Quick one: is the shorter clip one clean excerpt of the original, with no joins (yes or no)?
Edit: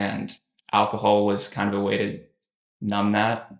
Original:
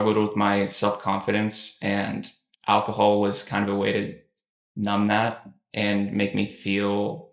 yes